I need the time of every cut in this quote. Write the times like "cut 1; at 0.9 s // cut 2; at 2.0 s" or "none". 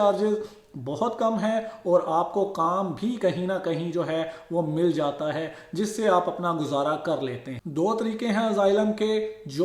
none